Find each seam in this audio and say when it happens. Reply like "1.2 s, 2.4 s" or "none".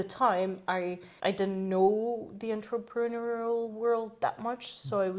1.0 s